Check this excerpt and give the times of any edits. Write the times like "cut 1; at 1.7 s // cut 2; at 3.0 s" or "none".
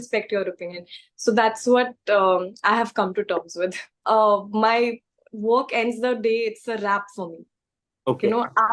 cut 1; at 3.9 s